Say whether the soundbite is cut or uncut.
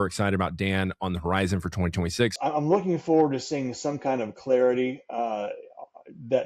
cut